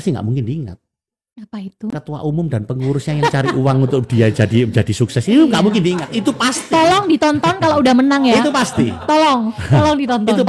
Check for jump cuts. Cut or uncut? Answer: uncut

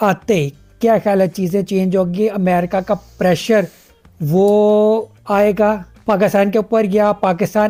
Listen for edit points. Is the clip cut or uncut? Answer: uncut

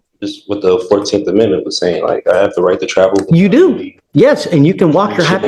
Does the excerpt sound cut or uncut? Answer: uncut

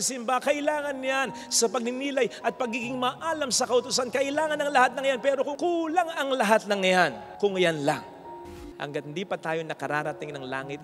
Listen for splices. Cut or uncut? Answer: cut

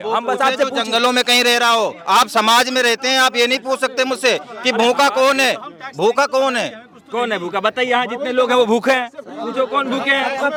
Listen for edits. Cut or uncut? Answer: uncut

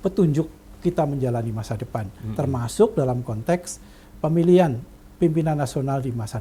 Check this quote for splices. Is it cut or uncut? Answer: uncut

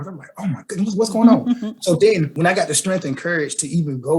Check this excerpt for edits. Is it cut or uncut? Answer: cut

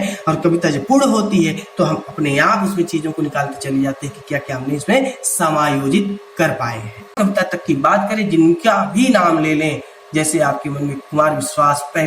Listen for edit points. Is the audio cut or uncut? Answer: cut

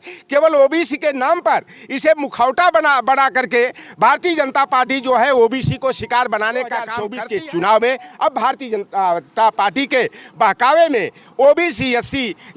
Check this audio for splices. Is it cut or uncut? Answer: cut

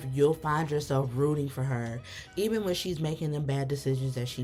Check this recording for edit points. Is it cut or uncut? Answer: uncut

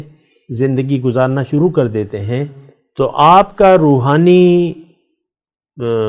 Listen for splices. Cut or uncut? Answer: uncut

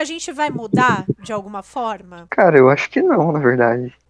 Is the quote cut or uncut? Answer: cut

